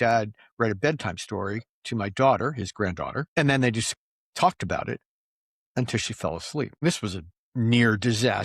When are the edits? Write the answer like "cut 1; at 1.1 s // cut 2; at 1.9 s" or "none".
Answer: cut 1; at 3.2 s // cut 2; at 6.8 s